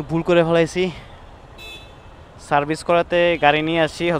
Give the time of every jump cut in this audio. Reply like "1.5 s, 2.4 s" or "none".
none